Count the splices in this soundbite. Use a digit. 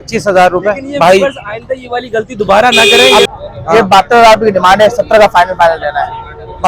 1